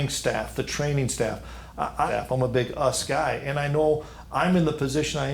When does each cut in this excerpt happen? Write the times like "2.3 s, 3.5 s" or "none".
2.1 s